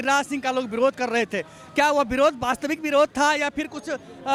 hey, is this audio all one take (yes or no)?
yes